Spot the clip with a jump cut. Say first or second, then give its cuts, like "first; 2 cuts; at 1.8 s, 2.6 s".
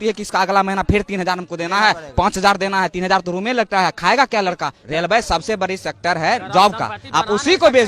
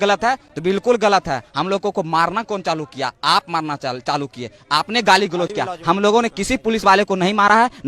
first; 1 cut; at 4.8 s